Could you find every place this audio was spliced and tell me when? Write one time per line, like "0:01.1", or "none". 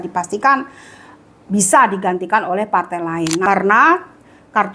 0:03.4